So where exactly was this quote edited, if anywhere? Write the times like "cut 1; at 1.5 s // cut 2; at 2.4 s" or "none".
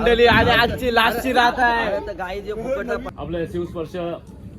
cut 1; at 3.1 s